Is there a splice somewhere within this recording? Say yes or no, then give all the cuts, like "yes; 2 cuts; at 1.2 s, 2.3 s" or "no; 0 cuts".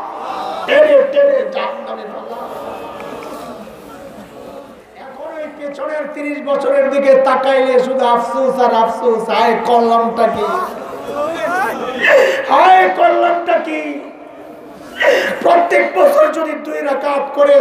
yes; 1 cut; at 5.2 s